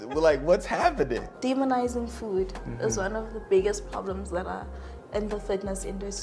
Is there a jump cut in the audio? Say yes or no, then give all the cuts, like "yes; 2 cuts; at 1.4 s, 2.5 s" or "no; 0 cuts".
yes; 1 cut; at 1.3 s